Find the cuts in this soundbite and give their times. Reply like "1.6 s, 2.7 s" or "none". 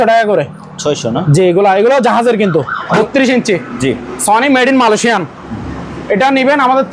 2.9 s